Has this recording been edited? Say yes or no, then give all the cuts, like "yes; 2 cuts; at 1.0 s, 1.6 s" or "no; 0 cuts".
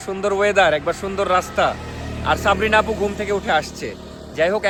no; 0 cuts